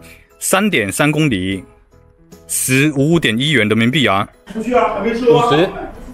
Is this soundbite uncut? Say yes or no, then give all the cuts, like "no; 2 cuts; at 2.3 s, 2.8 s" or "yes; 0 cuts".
no; 1 cut; at 4.4 s